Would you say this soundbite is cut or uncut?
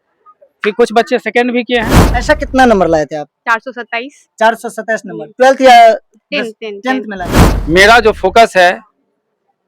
cut